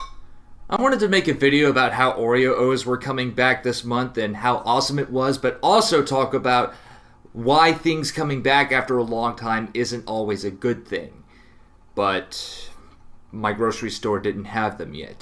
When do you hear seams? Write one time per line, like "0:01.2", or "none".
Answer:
none